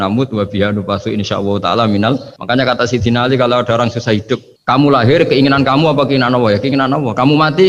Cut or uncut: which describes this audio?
cut